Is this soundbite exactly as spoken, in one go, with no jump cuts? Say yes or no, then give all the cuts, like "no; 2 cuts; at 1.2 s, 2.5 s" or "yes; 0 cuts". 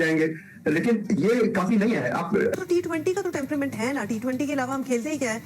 no; 1 cut; at 2.5 s